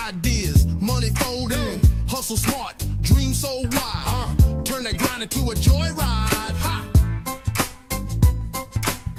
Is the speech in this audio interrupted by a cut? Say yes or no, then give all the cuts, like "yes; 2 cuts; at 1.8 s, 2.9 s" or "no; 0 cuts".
no; 0 cuts